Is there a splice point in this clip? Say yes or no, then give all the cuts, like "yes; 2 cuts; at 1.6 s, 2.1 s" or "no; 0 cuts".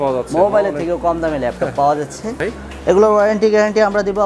yes; 1 cut; at 2.4 s